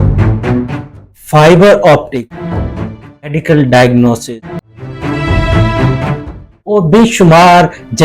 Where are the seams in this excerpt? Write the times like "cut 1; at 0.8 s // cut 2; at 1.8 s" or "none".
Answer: cut 1; at 2.4 s // cut 2; at 4.2 s